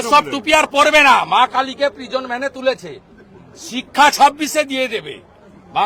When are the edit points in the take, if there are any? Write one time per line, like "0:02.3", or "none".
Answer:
none